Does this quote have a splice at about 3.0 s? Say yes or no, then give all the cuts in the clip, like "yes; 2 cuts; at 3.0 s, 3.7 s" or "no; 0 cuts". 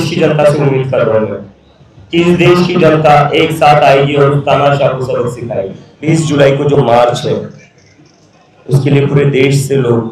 no; 1 cut; at 6.1 s